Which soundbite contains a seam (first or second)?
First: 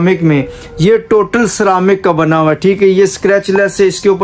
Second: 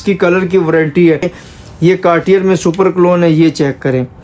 second